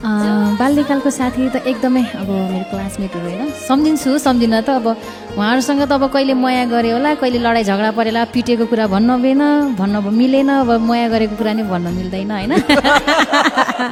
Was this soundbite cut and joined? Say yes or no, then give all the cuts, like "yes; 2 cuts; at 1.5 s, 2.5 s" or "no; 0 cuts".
no; 0 cuts